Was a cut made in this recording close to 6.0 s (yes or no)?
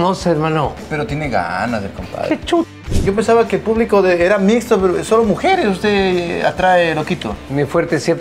no